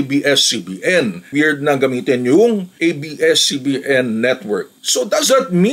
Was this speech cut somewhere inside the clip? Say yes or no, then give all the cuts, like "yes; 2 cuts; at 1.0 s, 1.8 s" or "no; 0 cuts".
yes; 1 cut; at 1.3 s